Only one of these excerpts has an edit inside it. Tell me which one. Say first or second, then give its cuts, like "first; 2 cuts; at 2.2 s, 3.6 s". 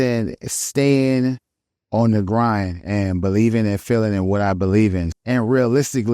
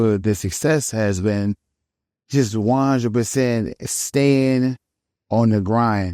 first; 1 cut; at 5.1 s